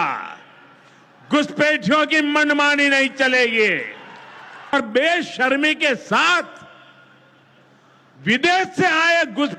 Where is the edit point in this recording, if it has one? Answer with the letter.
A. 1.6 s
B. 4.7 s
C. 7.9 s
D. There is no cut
B